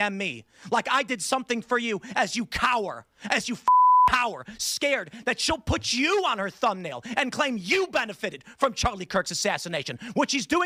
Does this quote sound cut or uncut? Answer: uncut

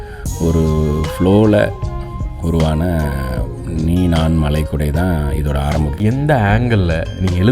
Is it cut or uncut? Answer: cut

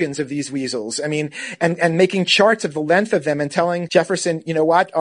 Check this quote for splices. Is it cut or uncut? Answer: cut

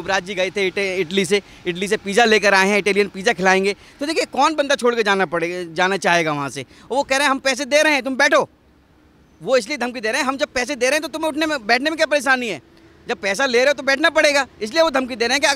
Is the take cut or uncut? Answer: uncut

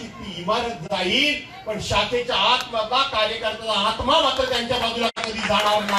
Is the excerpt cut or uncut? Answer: cut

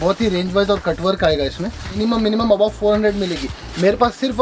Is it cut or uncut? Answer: cut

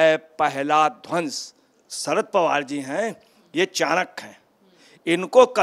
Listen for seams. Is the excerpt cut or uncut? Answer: cut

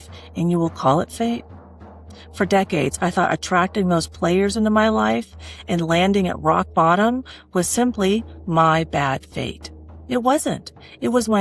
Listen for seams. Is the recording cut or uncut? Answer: uncut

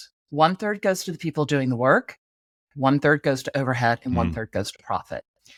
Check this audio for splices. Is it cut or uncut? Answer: uncut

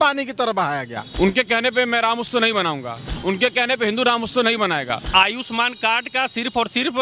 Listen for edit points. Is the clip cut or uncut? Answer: cut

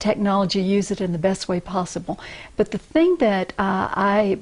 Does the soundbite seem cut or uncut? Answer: uncut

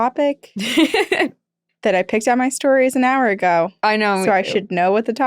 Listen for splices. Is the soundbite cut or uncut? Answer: uncut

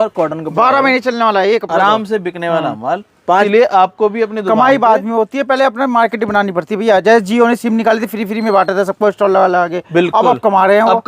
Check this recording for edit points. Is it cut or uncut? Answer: cut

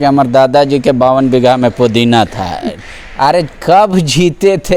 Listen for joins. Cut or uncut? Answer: uncut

